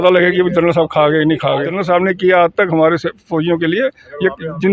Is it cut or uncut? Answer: cut